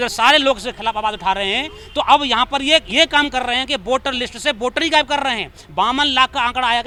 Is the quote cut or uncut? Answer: uncut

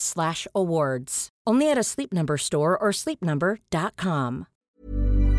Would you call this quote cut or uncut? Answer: cut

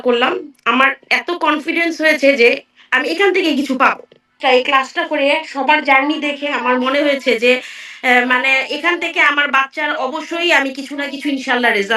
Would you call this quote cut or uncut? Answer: cut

